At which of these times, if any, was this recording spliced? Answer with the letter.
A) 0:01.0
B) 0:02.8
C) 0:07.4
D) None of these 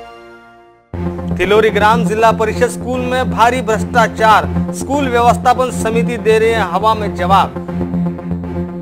A